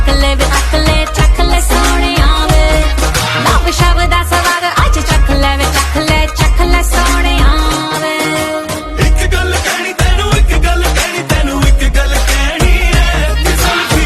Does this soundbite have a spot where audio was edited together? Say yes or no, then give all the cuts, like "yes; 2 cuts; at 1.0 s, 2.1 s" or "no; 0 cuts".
no; 0 cuts